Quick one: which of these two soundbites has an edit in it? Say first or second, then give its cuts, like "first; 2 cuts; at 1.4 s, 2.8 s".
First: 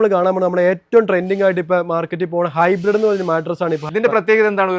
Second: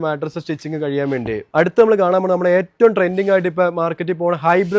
first; 1 cut; at 3.8 s